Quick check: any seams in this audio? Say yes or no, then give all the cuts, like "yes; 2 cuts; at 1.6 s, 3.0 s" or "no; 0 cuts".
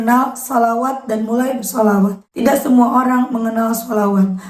yes; 1 cut; at 2.3 s